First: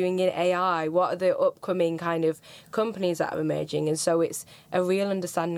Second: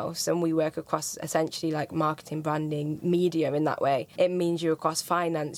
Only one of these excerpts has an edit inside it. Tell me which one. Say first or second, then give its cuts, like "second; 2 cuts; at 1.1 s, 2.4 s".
second; 1 cut; at 4.1 s